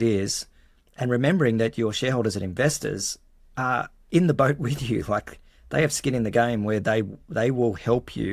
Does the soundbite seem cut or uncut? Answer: uncut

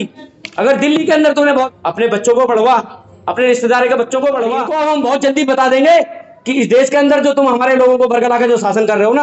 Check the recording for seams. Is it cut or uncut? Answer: cut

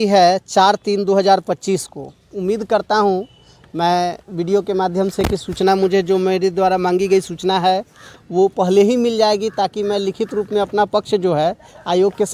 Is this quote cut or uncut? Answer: uncut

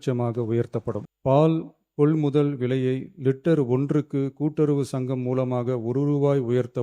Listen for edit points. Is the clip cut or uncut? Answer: cut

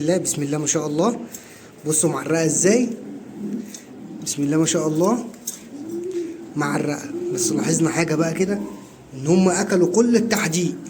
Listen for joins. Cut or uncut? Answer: uncut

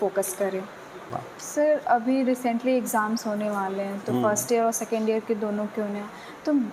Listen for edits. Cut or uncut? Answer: cut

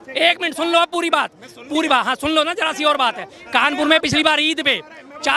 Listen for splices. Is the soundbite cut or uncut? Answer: uncut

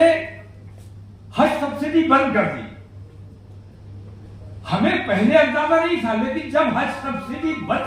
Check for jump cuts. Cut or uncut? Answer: uncut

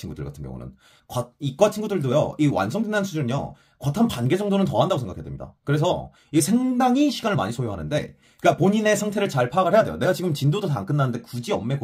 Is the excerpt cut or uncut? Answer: uncut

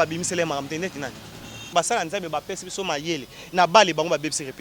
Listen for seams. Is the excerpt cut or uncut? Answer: cut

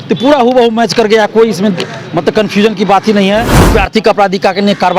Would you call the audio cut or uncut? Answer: cut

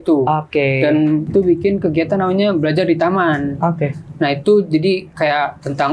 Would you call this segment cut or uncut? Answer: cut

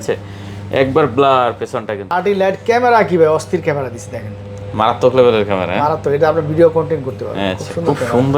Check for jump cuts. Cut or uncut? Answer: cut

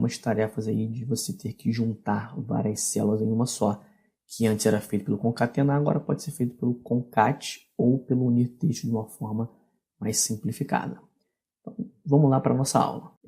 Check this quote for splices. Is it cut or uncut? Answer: cut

